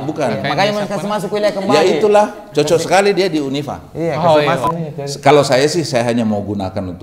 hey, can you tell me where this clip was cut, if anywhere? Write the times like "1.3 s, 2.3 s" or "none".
4.7 s

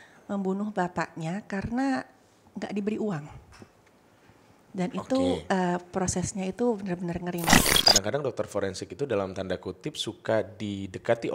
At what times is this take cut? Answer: 7.7 s

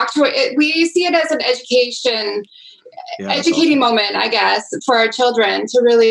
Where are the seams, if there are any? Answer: none

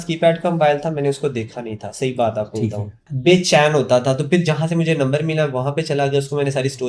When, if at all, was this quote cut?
3.1 s

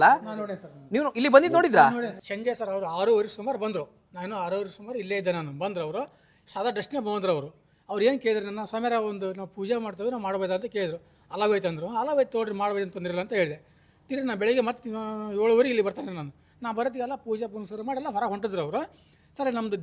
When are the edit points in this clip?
2.1 s

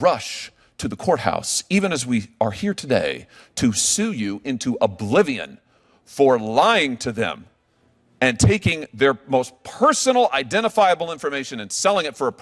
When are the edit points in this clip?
none

